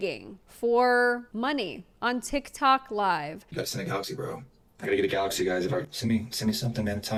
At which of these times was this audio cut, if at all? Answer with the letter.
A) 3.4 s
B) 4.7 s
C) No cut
C